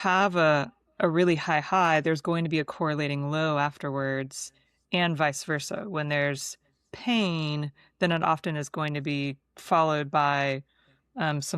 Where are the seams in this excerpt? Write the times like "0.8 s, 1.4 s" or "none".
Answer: none

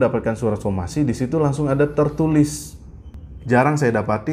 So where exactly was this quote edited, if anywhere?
3.3 s

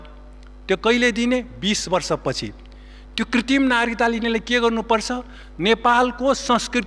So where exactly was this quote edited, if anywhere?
none

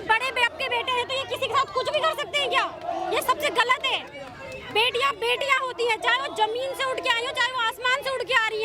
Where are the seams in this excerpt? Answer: none

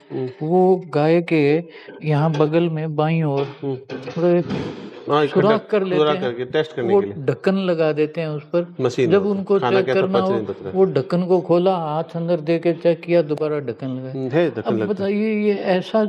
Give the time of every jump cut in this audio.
none

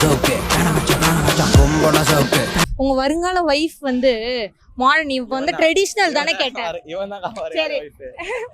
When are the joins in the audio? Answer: 2.7 s

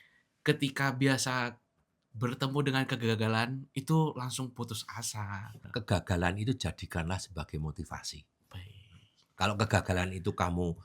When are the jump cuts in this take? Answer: 5.6 s

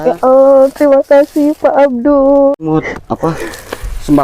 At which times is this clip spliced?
2.5 s

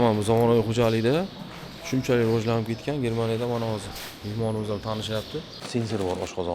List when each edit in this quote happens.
5.6 s

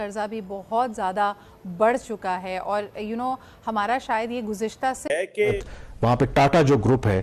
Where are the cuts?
5.5 s

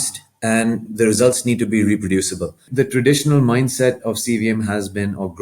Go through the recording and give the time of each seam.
0.9 s, 2.7 s

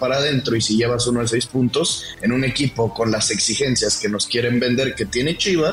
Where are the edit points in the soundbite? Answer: none

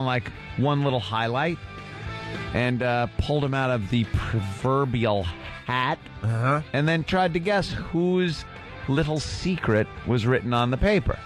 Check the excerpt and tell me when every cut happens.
none

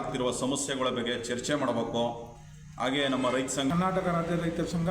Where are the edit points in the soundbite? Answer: 3.7 s

